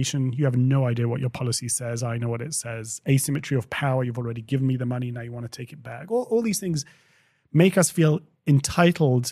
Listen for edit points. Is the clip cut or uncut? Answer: uncut